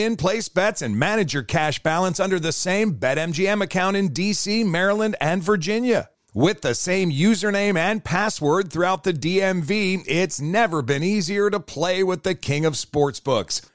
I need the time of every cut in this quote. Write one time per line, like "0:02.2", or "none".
none